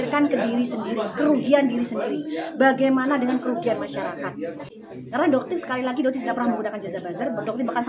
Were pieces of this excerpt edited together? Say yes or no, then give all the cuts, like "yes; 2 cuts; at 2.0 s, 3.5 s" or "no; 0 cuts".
yes; 1 cut; at 4.6 s